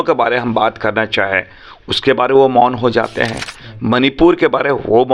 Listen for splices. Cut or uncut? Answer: uncut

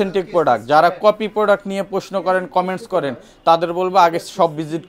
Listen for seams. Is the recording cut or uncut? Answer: uncut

